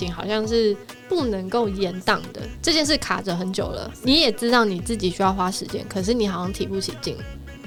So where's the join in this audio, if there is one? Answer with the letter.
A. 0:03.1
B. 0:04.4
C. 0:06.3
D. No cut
D